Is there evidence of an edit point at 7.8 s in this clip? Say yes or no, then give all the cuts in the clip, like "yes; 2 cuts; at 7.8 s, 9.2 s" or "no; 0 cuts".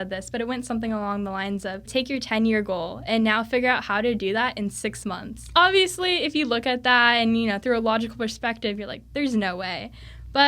no; 2 cuts; at 1.9 s, 5.5 s